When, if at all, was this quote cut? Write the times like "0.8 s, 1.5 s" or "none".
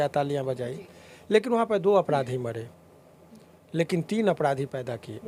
none